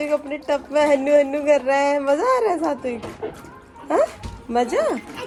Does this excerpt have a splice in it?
no; 0 cuts

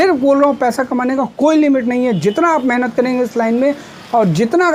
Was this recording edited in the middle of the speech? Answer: no; 0 cuts

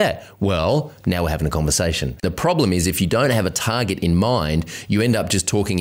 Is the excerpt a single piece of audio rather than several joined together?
no; 1 cut; at 2.2 s

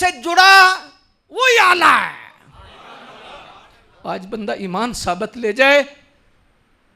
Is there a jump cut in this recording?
yes; 1 cut; at 3.8 s

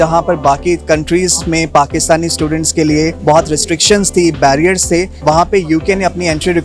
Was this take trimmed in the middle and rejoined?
yes; 2 cuts; at 3.2 s, 5.1 s

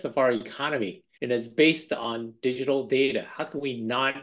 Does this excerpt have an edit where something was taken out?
yes; 1 cut; at 1.0 s

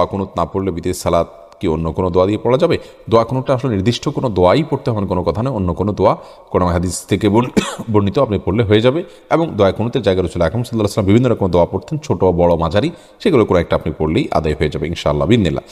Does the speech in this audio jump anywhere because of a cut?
no; 0 cuts

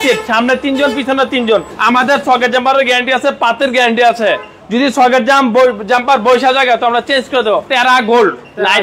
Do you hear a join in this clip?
yes; 2 cuts; at 1.7 s, 7.7 s

